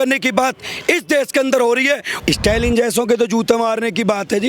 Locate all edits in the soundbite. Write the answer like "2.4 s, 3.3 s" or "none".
2.1 s